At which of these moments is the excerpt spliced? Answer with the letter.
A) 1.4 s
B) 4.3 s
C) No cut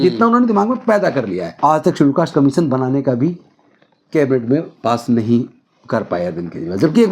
A